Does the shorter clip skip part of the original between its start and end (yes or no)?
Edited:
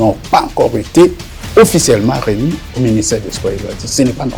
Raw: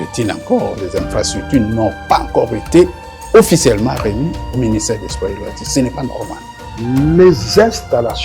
no